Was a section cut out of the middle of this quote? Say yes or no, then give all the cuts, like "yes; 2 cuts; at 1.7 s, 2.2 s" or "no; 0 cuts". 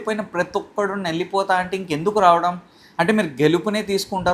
no; 0 cuts